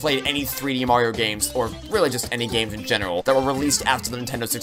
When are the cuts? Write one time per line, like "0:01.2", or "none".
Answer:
none